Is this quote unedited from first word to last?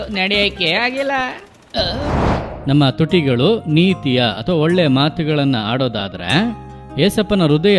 no; 1 cut; at 2.5 s

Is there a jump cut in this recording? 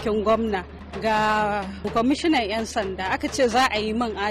no; 0 cuts

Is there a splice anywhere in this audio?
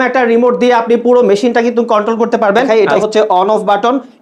yes; 1 cut; at 2.7 s

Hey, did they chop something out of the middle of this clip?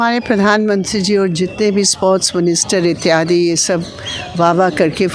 no; 0 cuts

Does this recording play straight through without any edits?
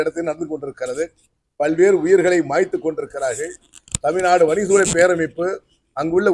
yes; 0 cuts

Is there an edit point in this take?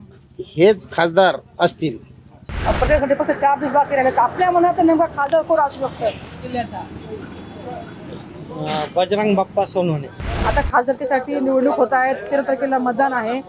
yes; 2 cuts; at 2.5 s, 10.3 s

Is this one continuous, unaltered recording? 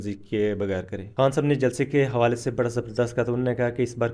no; 1 cut; at 1.0 s

